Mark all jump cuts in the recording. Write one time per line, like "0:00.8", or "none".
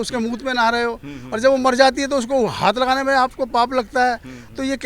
none

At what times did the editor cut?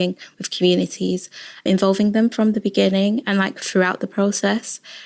0:01.7

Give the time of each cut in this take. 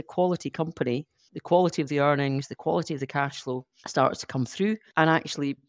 none

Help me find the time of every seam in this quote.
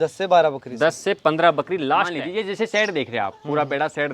0:02.2

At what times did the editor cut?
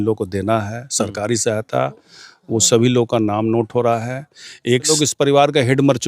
0:04.9

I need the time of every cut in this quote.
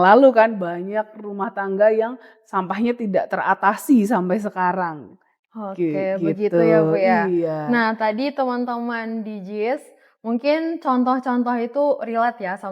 none

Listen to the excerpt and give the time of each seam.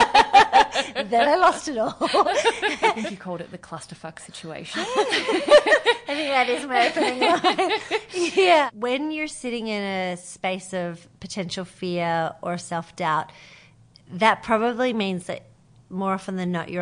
0:03.1
0:08.7

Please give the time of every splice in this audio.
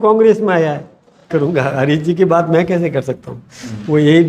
0:01.3

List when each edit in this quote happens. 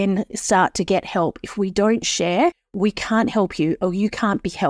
0:02.7

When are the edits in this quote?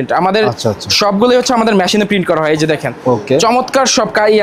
none

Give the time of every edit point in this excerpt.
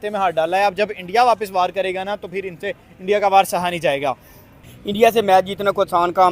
0:04.8

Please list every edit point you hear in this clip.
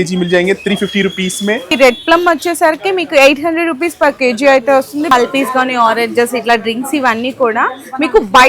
0:01.7
0:05.1

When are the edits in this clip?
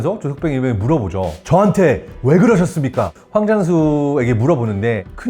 0:01.4
0:03.1

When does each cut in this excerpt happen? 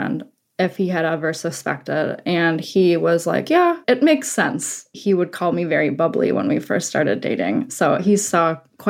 0:03.8
0:05.0

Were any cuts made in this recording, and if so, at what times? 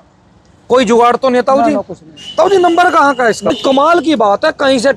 0:03.5

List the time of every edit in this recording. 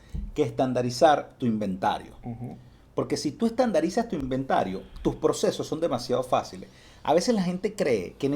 0:04.1

